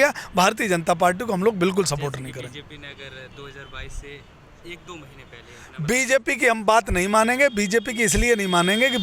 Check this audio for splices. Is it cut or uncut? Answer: uncut